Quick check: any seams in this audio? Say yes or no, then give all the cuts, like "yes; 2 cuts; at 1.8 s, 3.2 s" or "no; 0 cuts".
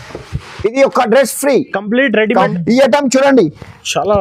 yes; 1 cut; at 2.5 s